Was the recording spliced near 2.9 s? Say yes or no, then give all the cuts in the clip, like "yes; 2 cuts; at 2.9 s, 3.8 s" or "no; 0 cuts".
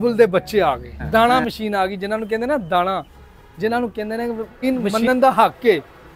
no; 2 cuts; at 0.9 s, 4.6 s